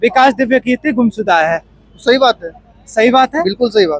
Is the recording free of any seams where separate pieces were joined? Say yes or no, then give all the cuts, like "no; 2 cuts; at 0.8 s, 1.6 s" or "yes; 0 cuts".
yes; 0 cuts